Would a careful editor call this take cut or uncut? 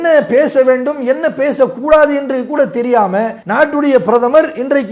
cut